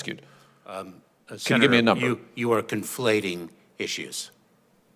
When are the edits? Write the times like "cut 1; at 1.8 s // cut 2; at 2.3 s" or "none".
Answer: none